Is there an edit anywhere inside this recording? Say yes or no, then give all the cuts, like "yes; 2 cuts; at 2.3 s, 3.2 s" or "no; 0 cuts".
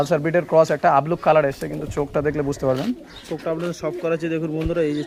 no; 0 cuts